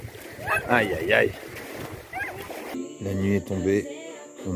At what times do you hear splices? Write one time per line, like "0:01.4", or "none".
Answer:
0:02.7